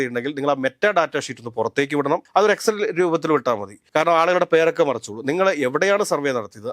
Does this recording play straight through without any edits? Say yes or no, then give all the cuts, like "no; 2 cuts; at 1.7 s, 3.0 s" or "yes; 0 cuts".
yes; 0 cuts